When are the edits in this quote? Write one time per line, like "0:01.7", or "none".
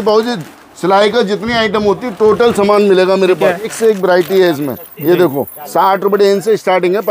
0:03.7